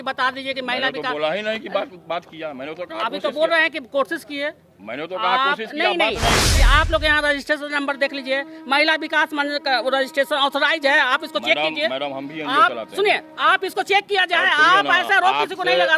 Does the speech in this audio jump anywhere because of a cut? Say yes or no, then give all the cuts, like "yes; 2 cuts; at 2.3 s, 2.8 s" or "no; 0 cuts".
yes; 1 cut; at 6.5 s